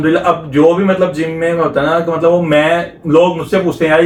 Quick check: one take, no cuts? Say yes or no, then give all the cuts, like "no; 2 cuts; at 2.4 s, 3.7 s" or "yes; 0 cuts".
yes; 0 cuts